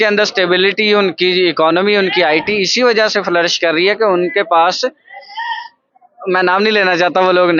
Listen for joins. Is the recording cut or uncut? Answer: uncut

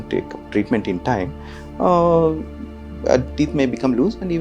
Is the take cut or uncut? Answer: uncut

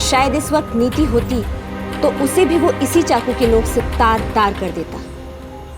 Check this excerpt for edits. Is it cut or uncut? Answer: uncut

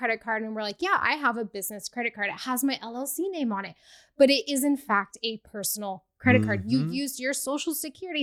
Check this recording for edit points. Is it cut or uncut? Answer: uncut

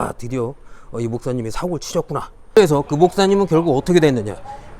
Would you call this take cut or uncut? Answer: cut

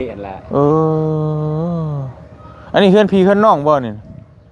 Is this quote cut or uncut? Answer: uncut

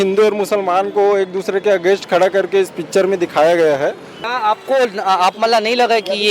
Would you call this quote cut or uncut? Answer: cut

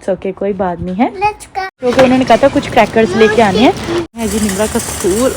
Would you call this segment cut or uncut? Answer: cut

